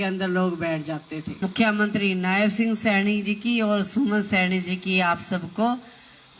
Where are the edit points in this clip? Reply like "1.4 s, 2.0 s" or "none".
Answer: 1.3 s